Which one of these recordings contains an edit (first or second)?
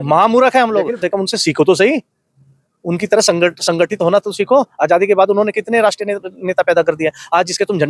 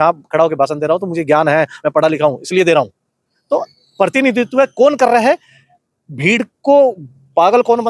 first